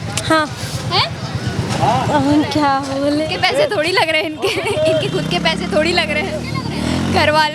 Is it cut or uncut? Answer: uncut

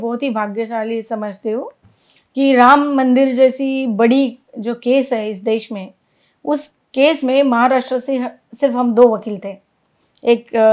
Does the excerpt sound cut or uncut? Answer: uncut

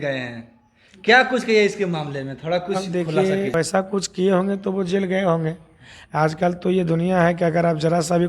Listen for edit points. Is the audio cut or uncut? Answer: cut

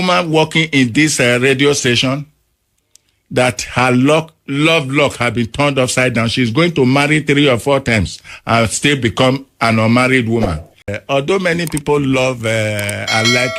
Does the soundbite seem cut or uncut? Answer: cut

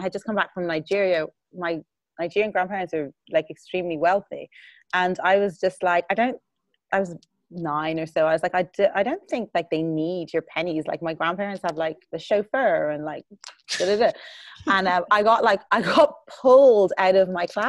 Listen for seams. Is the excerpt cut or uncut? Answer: uncut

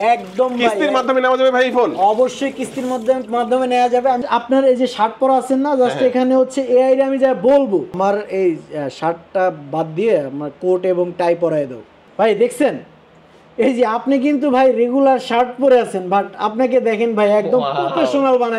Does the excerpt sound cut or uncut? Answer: cut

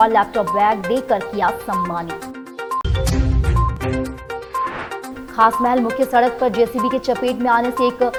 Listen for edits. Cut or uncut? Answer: uncut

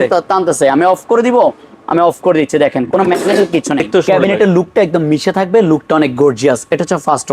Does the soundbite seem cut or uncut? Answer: cut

